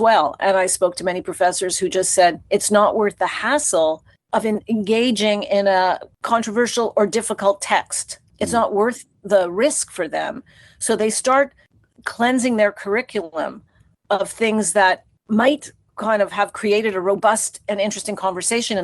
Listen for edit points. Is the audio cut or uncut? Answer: cut